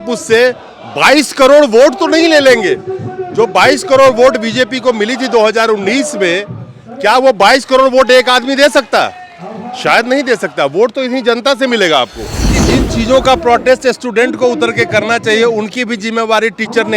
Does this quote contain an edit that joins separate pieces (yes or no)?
yes